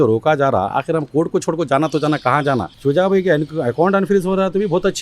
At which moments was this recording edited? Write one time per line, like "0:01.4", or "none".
0:02.7